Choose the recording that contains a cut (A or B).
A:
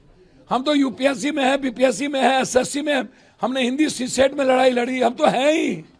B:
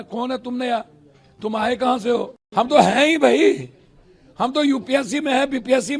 B